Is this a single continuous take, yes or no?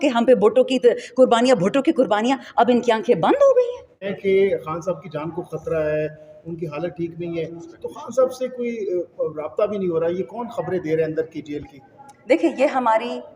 no